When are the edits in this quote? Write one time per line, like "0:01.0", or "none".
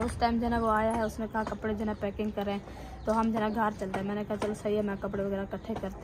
none